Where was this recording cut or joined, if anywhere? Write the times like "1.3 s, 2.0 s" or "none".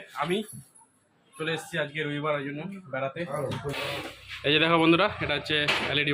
3.3 s